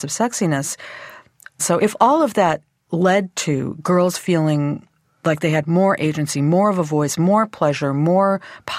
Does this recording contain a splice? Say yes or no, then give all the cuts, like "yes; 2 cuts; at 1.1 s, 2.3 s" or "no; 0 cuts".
yes; 1 cut; at 1.6 s